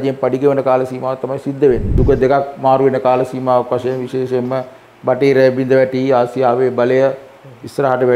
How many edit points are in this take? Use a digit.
1